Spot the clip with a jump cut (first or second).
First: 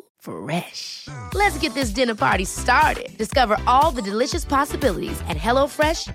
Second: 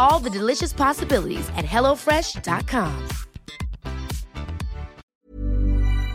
second